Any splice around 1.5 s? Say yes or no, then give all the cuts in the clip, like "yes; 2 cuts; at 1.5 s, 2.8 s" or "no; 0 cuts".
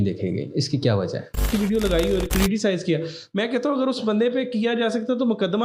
yes; 1 cut; at 1.5 s